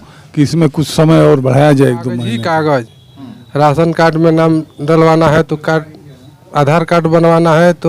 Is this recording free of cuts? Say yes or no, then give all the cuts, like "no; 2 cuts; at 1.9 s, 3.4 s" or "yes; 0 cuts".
no; 1 cut; at 2.4 s